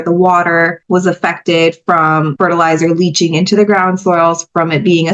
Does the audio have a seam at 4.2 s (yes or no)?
no